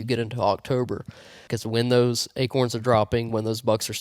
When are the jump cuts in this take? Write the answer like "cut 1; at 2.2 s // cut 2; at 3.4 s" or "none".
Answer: cut 1; at 1.4 s

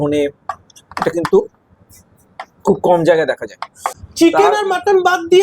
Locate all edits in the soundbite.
cut 1; at 4.0 s

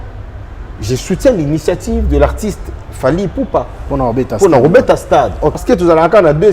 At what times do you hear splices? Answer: cut 1; at 5.6 s

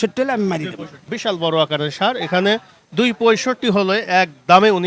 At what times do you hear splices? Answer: cut 1; at 1.1 s

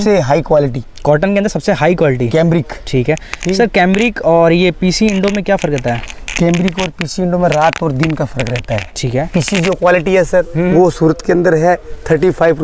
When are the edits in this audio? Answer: none

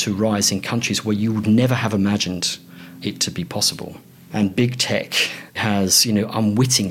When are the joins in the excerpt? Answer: cut 1; at 4.1 s // cut 2; at 5.6 s

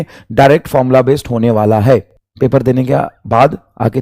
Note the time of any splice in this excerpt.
cut 1; at 2.2 s

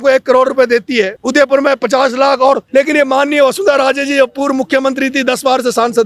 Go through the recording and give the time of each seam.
cut 1; at 1.2 s // cut 2; at 2.6 s

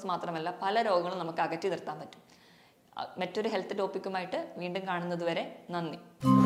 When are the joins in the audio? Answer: none

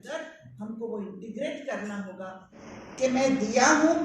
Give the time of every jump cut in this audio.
cut 1; at 2.6 s

